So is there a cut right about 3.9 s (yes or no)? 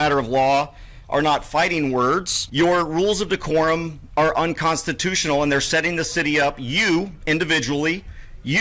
no